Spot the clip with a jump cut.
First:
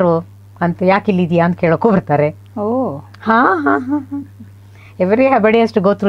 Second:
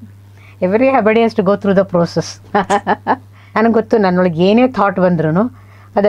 second; 1 cut; at 3.4 s

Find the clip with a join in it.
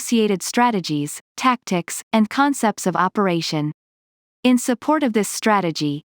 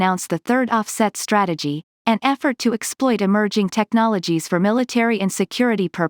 first; 1 cut; at 4.3 s

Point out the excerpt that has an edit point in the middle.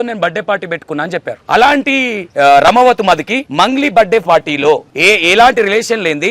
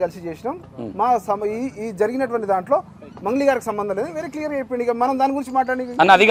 first; 4 cuts; at 1.3 s, 2.2 s, 3.4 s, 4.9 s

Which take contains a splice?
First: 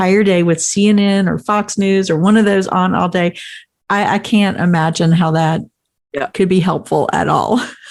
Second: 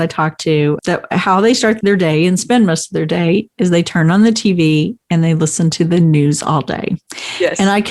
second; 2 cuts; at 0.8 s, 1.8 s

